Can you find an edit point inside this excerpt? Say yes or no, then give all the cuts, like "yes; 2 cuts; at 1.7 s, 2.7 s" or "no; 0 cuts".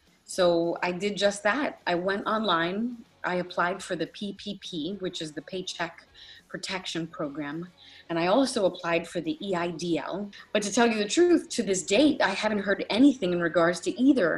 yes; 1 cut; at 10.3 s